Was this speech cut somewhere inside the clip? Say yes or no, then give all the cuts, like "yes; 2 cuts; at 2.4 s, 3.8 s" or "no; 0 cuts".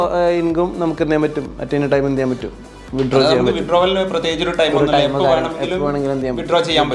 no; 0 cuts